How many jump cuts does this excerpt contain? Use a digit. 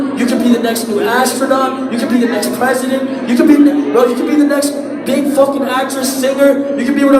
0